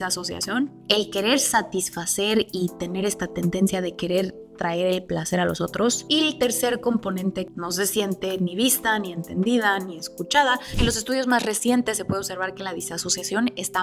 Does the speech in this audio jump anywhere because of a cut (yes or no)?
yes